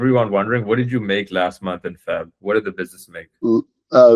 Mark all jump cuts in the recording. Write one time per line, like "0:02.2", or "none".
none